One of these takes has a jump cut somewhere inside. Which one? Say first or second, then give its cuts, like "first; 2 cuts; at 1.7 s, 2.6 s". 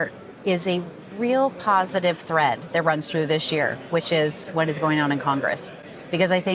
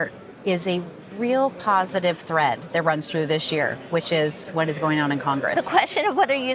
second; 1 cut; at 5.5 s